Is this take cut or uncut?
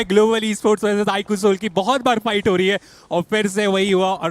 uncut